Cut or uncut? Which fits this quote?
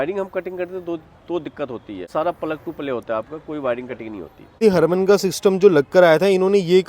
cut